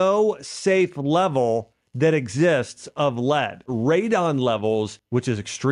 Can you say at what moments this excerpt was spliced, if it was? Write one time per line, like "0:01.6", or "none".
0:03.7